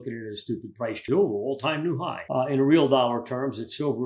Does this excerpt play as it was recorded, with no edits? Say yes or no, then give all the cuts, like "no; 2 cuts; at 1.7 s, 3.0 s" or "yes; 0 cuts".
no; 2 cuts; at 1.0 s, 2.2 s